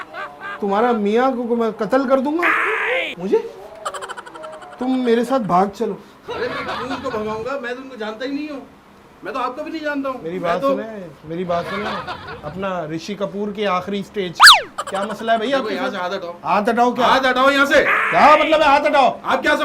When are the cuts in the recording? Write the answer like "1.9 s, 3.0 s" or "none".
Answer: none